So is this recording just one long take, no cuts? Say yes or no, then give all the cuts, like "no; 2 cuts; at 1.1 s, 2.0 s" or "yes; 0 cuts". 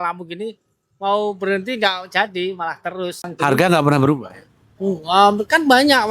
no; 1 cut; at 3.3 s